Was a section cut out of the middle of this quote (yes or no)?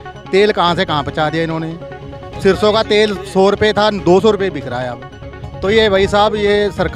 no